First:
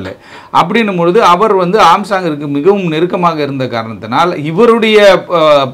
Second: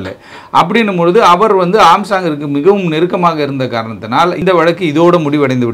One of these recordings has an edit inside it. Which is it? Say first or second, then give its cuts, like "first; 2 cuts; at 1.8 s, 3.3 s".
second; 1 cut; at 4.4 s